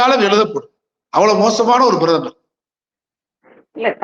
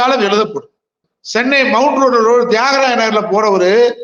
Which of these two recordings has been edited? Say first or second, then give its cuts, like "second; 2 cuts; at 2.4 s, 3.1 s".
second; 1 cut; at 1.0 s